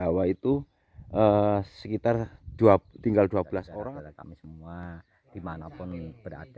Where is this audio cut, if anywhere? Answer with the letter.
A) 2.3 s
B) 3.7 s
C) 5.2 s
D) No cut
B